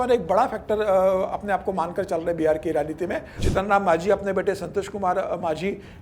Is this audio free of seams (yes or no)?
no